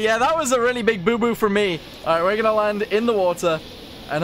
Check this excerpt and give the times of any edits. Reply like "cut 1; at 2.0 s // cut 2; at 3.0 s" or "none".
cut 1; at 1.9 s

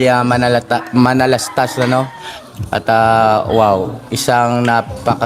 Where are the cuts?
cut 1; at 1.5 s

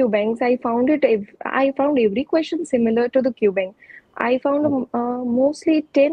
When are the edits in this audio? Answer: none

